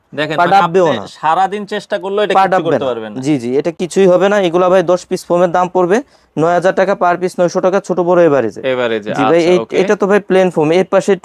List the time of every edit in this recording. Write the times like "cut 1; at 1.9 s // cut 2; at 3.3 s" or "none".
none